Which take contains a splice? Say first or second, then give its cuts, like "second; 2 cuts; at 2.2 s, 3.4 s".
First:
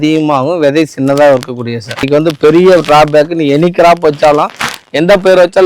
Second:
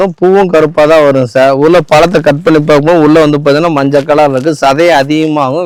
first; 1 cut; at 2.1 s